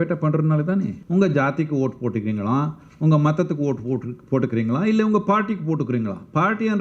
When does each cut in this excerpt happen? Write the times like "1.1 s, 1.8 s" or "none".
1.0 s